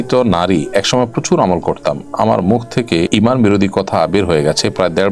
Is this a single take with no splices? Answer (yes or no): no